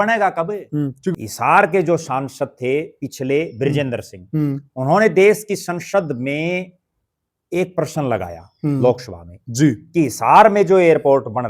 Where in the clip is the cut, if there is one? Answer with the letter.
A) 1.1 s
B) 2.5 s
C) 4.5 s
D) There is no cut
A